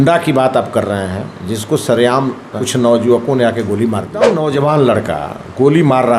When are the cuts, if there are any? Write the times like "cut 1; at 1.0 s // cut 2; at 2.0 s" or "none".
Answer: cut 1; at 2.5 s // cut 2; at 4.3 s